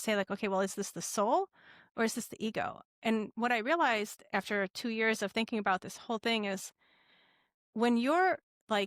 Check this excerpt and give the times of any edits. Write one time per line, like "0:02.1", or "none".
none